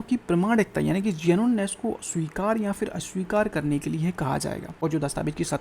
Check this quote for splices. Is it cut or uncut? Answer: cut